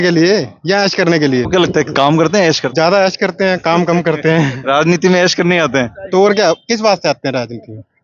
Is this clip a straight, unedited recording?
no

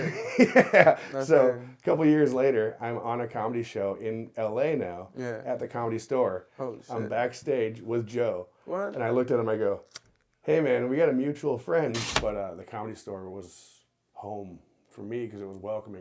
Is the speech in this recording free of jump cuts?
no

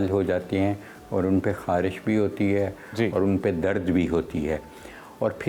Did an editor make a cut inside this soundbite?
no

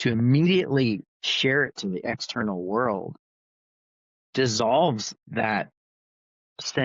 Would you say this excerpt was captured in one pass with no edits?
yes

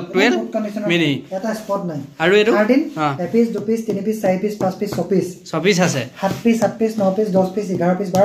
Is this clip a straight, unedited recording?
yes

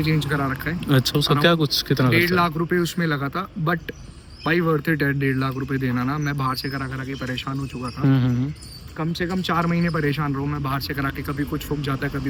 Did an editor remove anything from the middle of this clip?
no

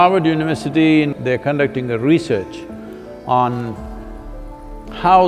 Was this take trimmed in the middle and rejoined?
yes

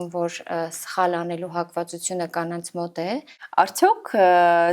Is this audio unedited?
no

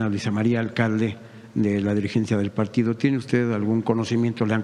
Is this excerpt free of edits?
yes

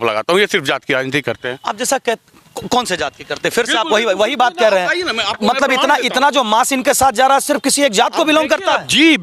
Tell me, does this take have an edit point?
no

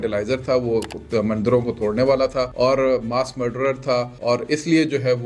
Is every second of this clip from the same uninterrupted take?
no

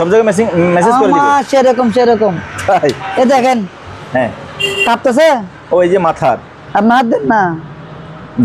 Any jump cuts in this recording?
no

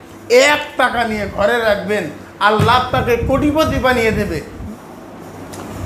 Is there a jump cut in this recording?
yes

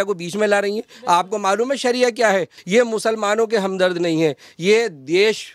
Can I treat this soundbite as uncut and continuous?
no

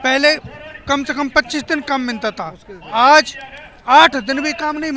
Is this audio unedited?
yes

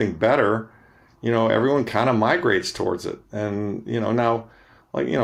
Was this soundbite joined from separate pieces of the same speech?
no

